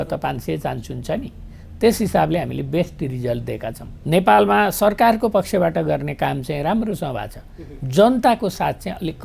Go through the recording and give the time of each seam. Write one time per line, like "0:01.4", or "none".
0:03.9

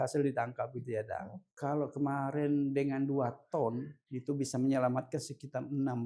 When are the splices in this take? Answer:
0:01.4

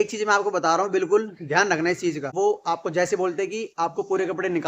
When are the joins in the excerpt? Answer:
0:02.3

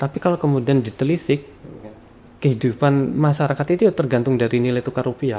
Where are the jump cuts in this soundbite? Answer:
none

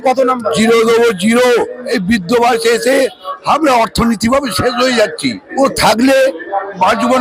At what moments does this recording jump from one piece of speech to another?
0:01.8
0:05.4

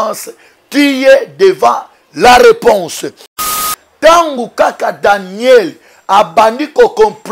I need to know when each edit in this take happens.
0:03.5

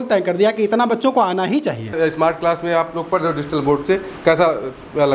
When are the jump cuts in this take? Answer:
0:01.9

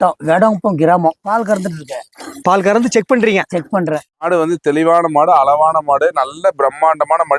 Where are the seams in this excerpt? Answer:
0:04.2

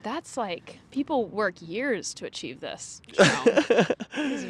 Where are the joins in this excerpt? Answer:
none

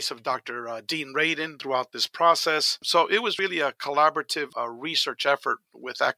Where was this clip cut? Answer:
0:01.6
0:02.8
0:04.5

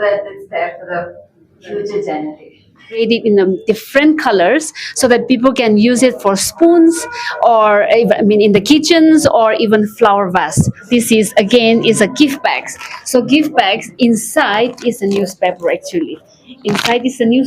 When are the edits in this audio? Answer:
0:03.0
0:10.9

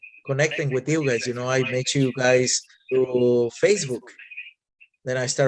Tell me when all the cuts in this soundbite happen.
0:02.8

